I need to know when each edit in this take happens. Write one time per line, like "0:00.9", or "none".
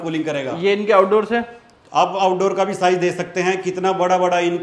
none